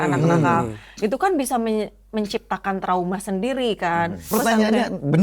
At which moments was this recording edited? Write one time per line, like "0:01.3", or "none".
0:04.3

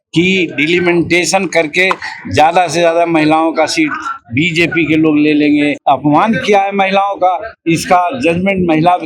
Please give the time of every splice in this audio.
0:05.8

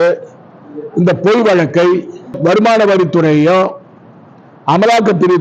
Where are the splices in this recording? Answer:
0:02.4

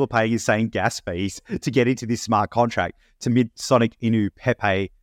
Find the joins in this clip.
0:03.3

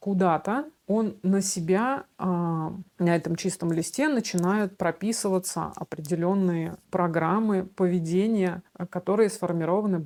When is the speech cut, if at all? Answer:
none

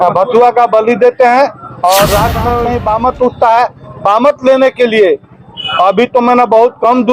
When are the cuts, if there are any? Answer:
0:02.7

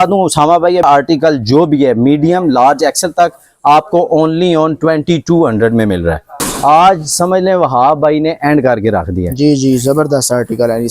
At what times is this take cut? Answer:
0:00.8
0:06.4

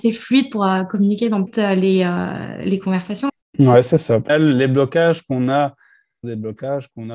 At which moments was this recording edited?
0:01.5
0:03.3
0:04.3
0:06.2

